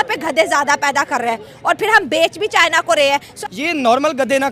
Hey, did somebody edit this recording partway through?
yes; 1 cut; at 3.3 s

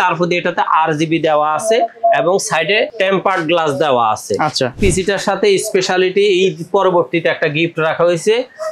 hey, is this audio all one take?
no; 2 cuts; at 2.9 s, 4.8 s

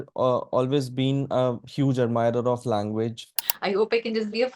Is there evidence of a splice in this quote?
yes; 1 cut; at 3.5 s

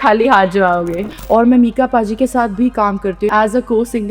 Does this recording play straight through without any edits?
no; 2 cuts; at 1.0 s, 3.3 s

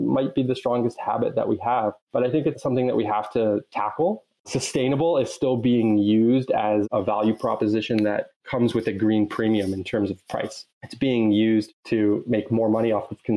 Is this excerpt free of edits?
no; 1 cut; at 4.3 s

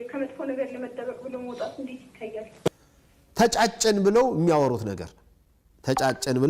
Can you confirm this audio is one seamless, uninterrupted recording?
no; 1 cut; at 2.7 s

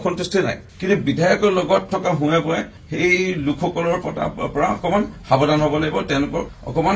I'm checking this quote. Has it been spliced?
no; 0 cuts

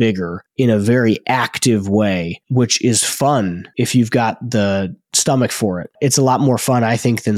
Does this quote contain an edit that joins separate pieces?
yes; 2 cuts; at 2.4 s, 3.6 s

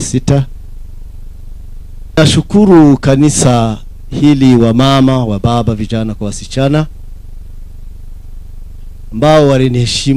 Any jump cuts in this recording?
yes; 1 cut; at 2.2 s

